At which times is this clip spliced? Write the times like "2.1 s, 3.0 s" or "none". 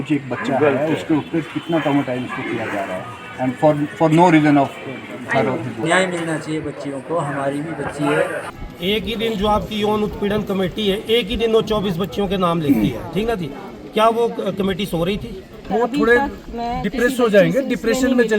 5.8 s, 8.5 s, 15.6 s